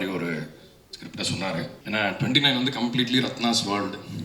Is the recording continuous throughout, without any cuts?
no; 1 cut; at 1.8 s

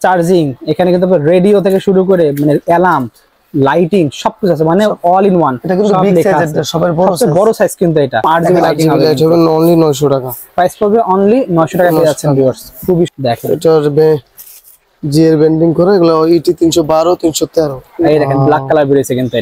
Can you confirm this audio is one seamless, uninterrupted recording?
no; 3 cuts; at 8.2 s, 13.1 s, 18.1 s

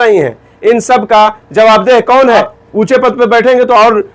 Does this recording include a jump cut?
yes; 1 cut; at 2.6 s

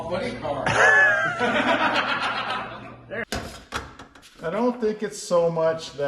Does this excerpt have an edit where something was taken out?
yes; 1 cut; at 3.2 s

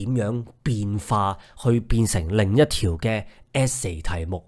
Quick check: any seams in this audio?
no; 0 cuts

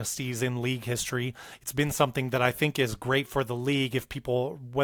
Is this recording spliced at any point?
no; 0 cuts

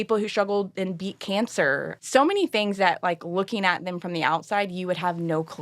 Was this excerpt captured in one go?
no; 1 cut; at 1.9 s

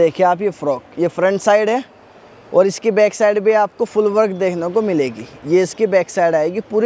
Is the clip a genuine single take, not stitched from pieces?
yes; 0 cuts

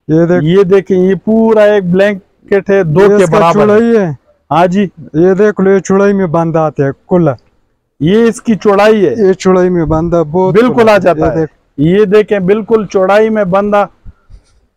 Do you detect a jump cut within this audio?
no; 0 cuts

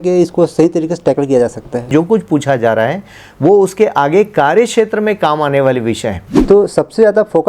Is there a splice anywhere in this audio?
yes; 2 cuts; at 1.9 s, 6.3 s

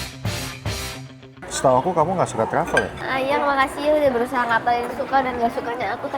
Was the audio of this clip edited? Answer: yes; 1 cut; at 1.4 s

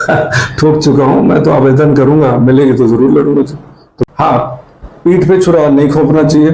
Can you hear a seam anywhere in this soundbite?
yes; 1 cut; at 4.1 s

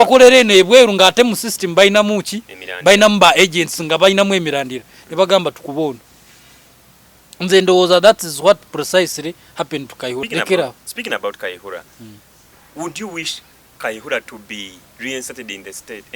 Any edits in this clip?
yes; 1 cut; at 10.2 s

